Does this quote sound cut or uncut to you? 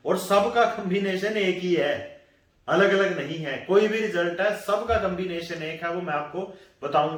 uncut